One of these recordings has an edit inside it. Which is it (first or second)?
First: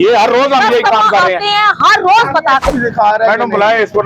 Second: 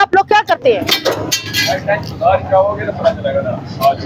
first